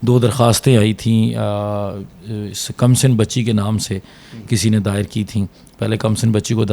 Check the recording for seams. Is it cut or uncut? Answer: uncut